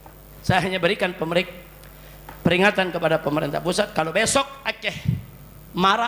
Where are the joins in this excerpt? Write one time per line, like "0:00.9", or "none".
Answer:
none